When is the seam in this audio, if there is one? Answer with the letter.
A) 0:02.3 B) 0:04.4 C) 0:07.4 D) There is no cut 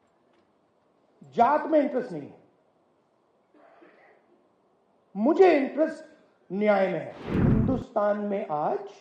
C